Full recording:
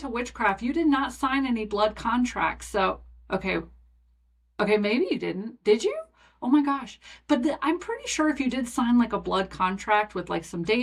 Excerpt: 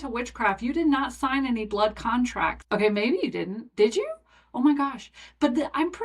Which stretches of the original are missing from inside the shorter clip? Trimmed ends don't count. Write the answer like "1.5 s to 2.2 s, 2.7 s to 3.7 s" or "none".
2.6 s to 4.5 s